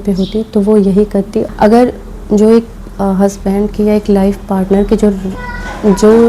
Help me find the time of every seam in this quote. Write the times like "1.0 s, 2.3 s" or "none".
1.5 s